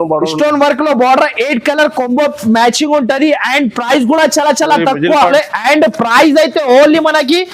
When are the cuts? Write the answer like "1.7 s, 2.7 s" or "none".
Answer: 5.3 s